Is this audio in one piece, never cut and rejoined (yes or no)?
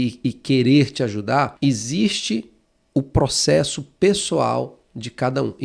no